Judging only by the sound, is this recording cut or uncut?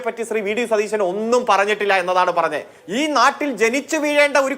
cut